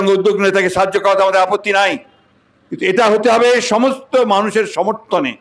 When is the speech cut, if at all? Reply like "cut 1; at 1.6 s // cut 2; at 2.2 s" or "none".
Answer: none